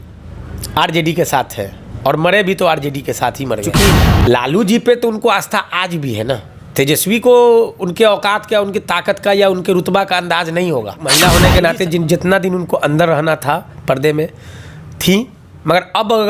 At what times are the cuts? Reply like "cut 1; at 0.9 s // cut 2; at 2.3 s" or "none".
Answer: cut 1; at 3.8 s // cut 2; at 11.0 s

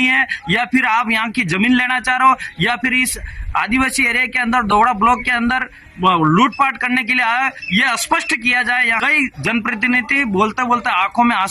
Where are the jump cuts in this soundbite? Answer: cut 1; at 9.0 s

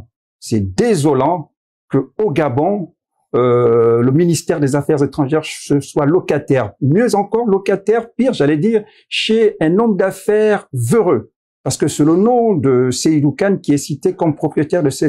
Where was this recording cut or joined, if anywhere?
none

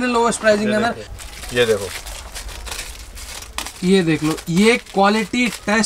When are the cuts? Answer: cut 1; at 1.1 s

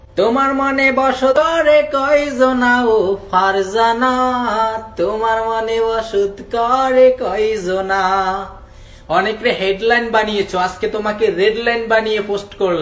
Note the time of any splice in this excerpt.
cut 1; at 1.3 s

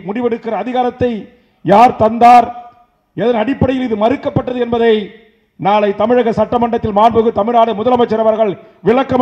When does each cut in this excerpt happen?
none

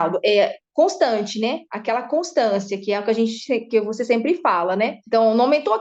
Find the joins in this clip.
none

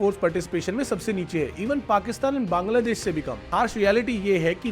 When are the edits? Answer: cut 1; at 3.4 s

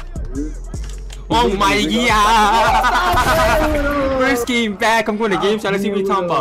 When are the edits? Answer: none

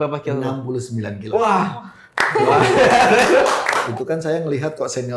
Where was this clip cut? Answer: cut 1; at 3.9 s

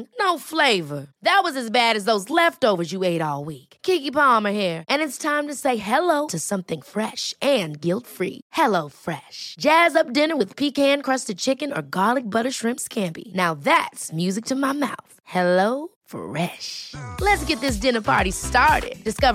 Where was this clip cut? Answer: none

